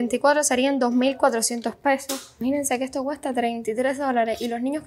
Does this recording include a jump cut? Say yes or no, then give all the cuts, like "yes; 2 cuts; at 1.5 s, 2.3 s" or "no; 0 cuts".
yes; 1 cut; at 2.4 s